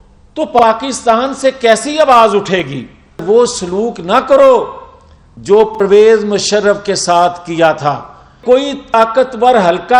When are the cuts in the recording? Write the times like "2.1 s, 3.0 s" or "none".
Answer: 3.2 s, 8.4 s